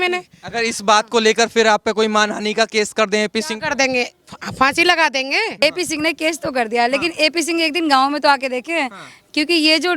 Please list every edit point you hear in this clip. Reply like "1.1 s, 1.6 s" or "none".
5.6 s

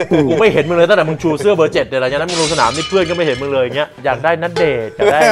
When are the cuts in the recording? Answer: 3.9 s

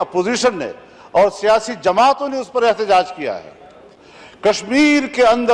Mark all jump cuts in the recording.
none

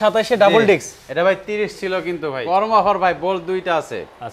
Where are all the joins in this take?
2.4 s

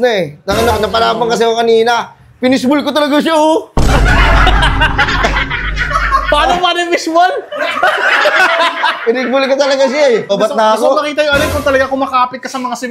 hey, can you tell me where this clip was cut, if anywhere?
10.3 s

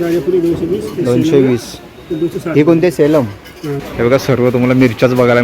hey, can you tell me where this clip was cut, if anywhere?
3.8 s

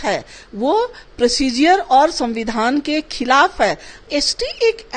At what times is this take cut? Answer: 4.1 s

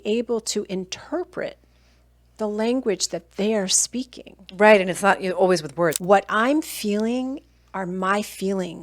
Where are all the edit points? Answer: 6.0 s

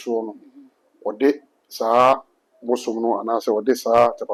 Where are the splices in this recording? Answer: none

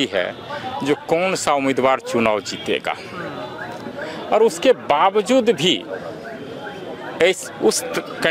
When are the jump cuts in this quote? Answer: none

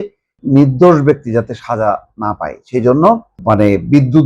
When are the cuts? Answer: 3.3 s

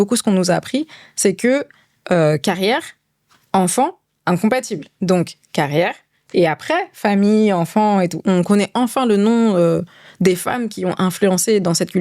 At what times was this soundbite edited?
8.2 s

